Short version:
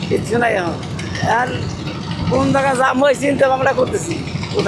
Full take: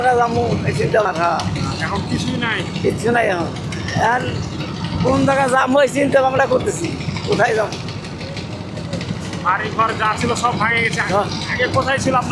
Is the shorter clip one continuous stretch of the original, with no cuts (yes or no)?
yes